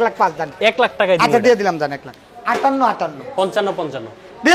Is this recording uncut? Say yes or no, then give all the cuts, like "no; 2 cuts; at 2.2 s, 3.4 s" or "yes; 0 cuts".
no; 1 cut; at 2.6 s